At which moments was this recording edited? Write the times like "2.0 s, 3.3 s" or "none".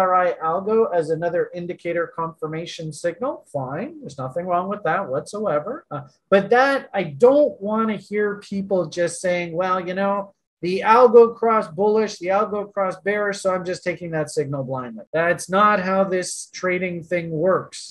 none

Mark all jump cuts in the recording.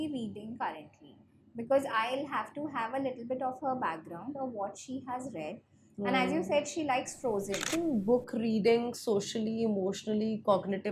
7.7 s

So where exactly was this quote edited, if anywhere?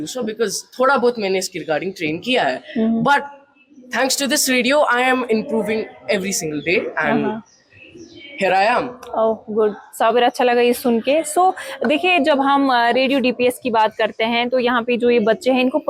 none

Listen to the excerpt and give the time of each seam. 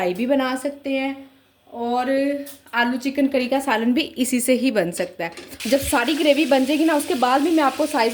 5.6 s

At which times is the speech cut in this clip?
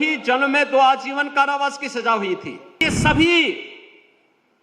2.8 s

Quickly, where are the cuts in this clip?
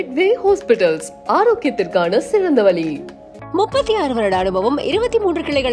none

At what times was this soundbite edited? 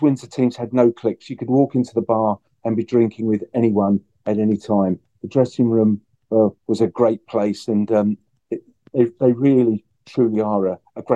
none

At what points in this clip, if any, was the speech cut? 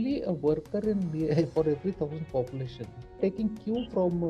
3.2 s

